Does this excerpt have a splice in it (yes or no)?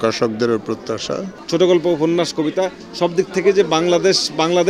yes